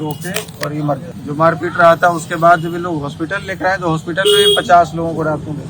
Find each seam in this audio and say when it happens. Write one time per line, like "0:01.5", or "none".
0:01.2

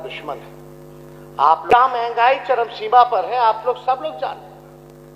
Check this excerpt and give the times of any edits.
0:01.7

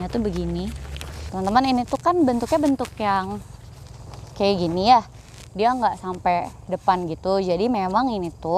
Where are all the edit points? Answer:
0:01.3

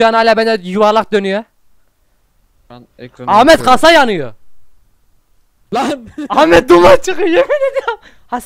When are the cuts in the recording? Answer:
none

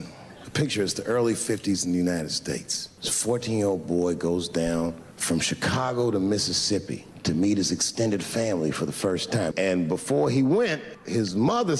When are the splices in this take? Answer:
0:02.3

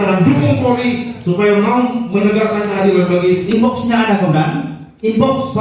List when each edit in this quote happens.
0:03.4

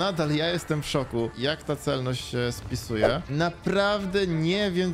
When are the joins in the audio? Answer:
0:03.2

